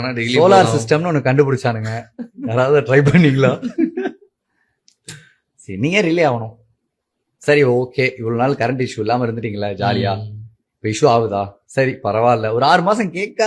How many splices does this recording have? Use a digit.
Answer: 1